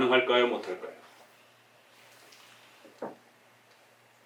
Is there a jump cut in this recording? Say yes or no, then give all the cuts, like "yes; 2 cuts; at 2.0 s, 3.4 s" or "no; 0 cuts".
no; 0 cuts